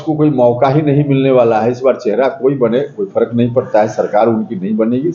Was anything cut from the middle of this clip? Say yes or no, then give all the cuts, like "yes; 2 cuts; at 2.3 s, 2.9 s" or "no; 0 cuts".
no; 0 cuts